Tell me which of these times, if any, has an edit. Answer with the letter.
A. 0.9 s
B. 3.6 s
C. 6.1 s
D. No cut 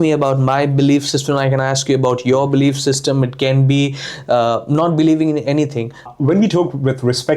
C